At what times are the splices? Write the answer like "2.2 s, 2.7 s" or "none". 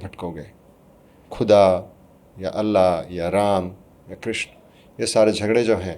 1.3 s